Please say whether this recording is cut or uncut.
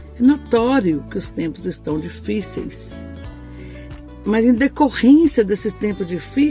cut